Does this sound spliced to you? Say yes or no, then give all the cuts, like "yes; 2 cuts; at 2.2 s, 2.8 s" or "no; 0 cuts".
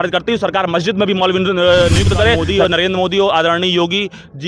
yes; 1 cut; at 2.4 s